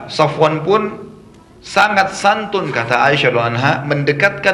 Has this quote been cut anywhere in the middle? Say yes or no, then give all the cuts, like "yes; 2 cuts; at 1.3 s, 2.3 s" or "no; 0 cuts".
no; 0 cuts